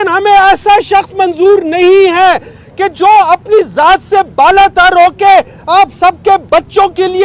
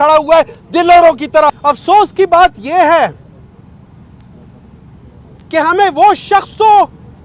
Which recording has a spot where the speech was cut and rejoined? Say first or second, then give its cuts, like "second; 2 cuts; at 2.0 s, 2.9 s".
second; 1 cut; at 1.5 s